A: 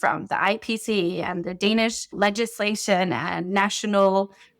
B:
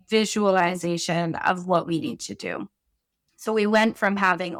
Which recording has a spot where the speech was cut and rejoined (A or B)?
A